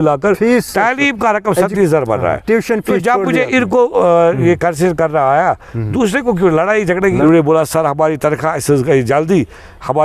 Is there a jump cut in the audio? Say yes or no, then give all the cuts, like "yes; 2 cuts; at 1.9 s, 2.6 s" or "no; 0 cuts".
yes; 1 cut; at 7.2 s